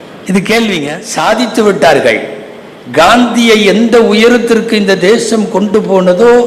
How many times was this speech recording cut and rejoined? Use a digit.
1